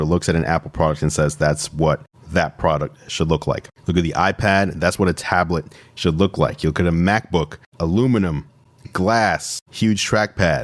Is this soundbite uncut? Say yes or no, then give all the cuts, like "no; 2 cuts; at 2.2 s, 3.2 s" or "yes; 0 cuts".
yes; 0 cuts